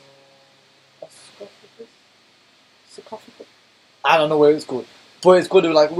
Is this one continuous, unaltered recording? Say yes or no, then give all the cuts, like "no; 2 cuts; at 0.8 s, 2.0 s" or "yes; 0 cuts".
yes; 0 cuts